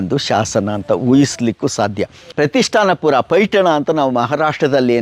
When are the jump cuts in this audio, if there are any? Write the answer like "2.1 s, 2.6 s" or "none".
2.2 s